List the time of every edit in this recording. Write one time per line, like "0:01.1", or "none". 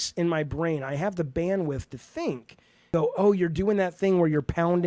0:02.9